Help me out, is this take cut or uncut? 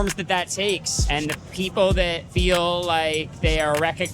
cut